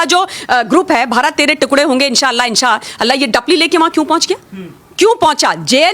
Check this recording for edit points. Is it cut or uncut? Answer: uncut